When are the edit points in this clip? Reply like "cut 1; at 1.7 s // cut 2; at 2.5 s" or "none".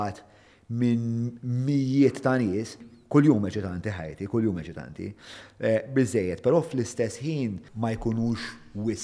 cut 1; at 2.9 s // cut 2; at 7.7 s